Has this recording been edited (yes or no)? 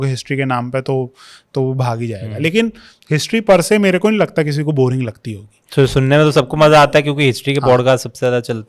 no